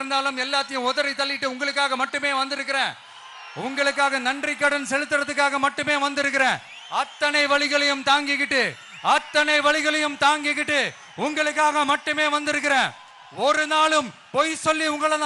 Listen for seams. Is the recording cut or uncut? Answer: uncut